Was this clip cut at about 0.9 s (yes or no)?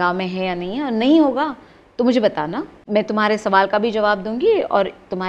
no